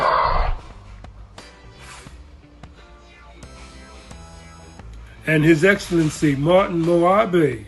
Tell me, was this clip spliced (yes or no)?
yes